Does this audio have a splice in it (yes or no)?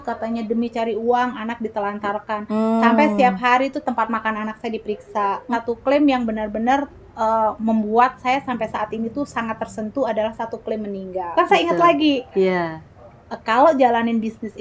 yes